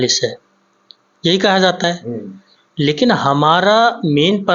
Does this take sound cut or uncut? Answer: uncut